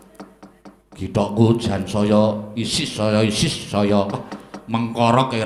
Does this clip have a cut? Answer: no; 0 cuts

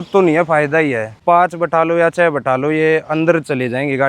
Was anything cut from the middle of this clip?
yes; 1 cut; at 1.2 s

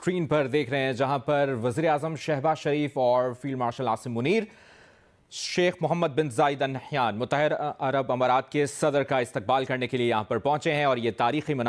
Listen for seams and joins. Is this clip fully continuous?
yes; 0 cuts

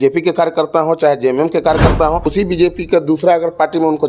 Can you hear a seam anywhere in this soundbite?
yes; 1 cut; at 2.3 s

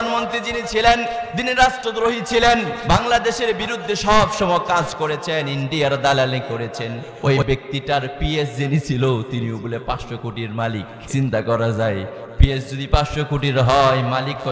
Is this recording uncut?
no; 4 cuts; at 1.3 s, 2.7 s, 7.0 s, 11.0 s

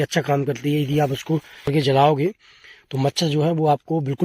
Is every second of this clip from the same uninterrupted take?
no; 1 cut; at 1.7 s

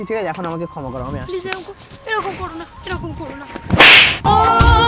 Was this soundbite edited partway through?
no; 0 cuts

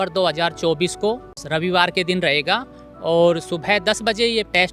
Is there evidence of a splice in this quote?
yes; 1 cut; at 1.3 s

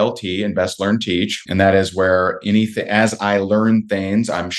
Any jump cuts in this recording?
yes; 1 cut; at 1.4 s

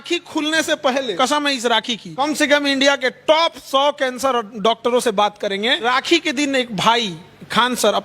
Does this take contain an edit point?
yes; 3 cuts; at 1.1 s, 2.1 s, 5.9 s

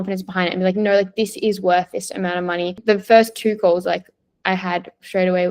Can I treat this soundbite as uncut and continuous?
no; 1 cut; at 2.8 s

